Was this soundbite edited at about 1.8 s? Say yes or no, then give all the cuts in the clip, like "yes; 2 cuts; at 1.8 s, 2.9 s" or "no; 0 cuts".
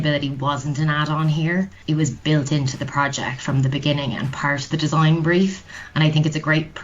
yes; 1 cut; at 1.8 s